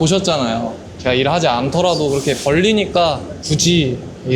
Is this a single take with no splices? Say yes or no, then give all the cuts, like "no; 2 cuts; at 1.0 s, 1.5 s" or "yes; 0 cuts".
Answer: yes; 0 cuts